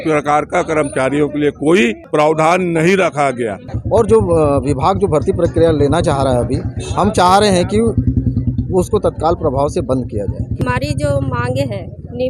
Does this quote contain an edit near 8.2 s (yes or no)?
no